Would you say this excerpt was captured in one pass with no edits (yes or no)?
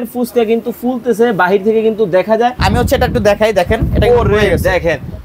no